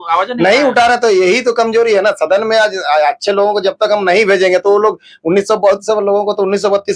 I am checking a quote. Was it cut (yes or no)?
no